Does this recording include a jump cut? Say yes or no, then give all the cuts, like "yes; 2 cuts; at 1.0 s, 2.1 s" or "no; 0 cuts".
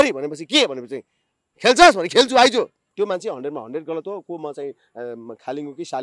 yes; 1 cut; at 2.8 s